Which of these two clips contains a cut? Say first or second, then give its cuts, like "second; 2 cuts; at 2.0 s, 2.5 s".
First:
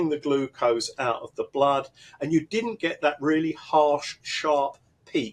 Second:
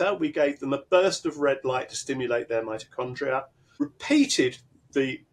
second; 1 cut; at 3.6 s